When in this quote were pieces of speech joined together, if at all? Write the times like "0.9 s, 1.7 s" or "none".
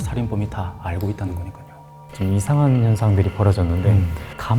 2.0 s